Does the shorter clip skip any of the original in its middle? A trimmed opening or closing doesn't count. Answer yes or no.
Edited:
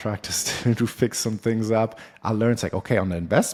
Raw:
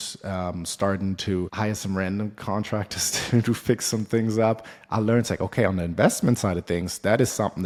no